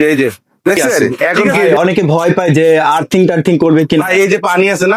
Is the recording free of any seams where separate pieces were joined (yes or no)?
no